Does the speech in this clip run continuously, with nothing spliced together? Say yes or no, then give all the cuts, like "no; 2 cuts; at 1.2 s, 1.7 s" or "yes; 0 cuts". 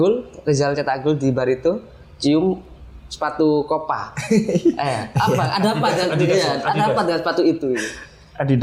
yes; 0 cuts